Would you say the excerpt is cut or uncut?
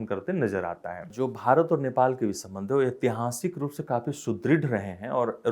cut